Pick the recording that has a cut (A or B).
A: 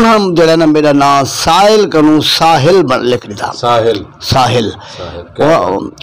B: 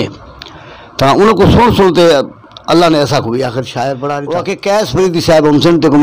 B